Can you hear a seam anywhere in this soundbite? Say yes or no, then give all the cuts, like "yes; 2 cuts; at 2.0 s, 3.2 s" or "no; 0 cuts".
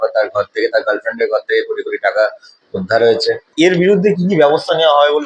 yes; 1 cut; at 3.5 s